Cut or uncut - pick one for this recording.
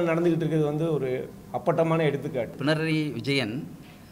cut